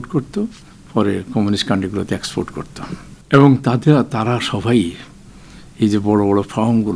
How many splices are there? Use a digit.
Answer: 1